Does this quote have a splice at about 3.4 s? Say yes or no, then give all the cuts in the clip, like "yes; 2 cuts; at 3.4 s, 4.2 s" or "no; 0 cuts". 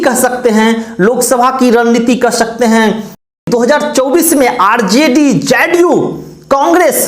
yes; 1 cut; at 3.4 s